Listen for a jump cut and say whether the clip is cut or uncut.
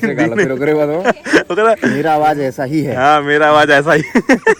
uncut